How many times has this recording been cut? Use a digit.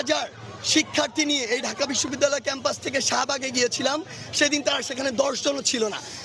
0